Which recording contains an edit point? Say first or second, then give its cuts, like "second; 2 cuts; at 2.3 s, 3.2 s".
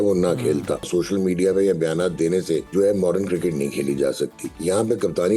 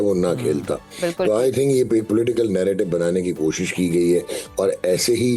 first; 3 cuts; at 0.9 s, 2.7 s, 4.5 s